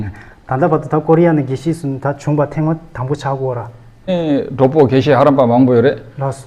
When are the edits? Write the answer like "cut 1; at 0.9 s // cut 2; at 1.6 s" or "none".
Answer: cut 1; at 4.1 s

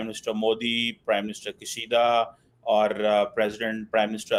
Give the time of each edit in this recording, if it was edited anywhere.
none

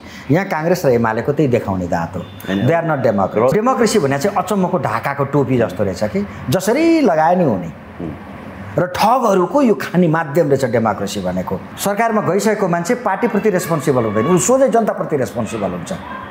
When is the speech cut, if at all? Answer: cut 1; at 3.5 s // cut 2; at 11.7 s

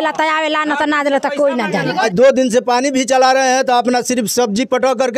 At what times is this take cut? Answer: cut 1; at 2.1 s

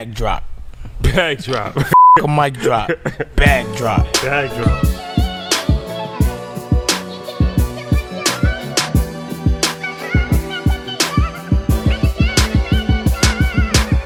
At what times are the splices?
none

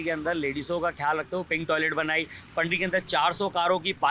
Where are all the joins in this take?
none

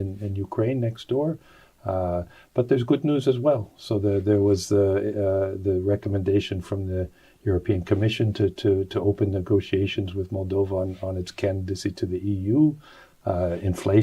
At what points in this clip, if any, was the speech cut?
none

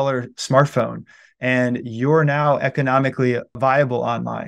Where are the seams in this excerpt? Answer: cut 1; at 3.5 s

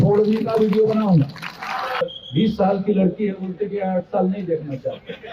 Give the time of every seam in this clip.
cut 1; at 2.0 s

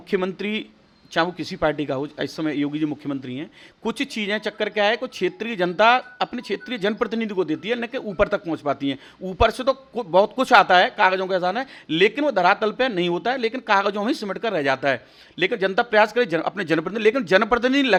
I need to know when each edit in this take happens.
none

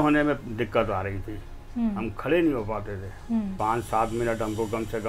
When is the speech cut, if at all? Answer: cut 1; at 3.5 s

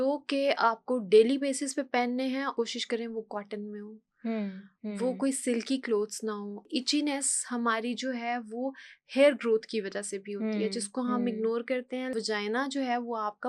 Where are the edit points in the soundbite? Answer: cut 1; at 2.5 s // cut 2; at 6.7 s // cut 3; at 12.1 s

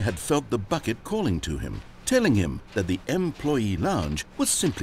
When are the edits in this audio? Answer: none

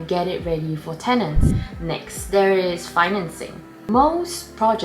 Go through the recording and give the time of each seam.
cut 1; at 1.5 s

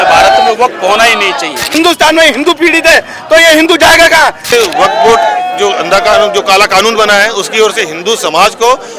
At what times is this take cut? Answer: cut 1; at 1.7 s // cut 2; at 4.5 s

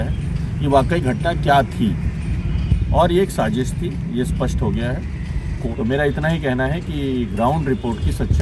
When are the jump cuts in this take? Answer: cut 1; at 5.6 s

